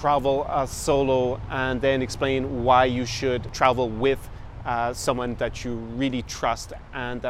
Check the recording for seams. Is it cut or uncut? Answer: cut